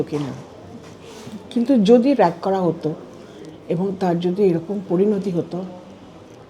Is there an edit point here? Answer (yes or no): no